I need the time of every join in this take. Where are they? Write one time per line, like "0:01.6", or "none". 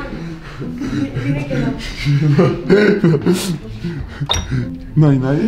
none